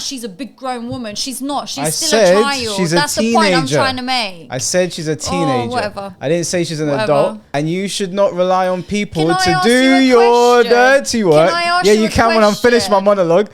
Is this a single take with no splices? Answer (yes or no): no